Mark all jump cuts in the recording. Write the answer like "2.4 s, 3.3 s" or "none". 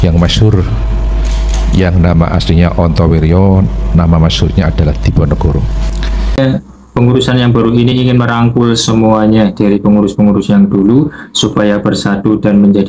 6.4 s